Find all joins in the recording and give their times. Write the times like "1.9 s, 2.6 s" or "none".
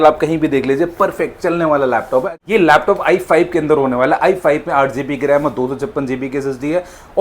2.3 s